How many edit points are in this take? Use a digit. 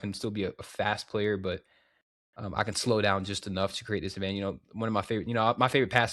0